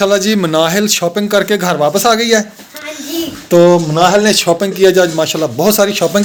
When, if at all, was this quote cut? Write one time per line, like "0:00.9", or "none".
none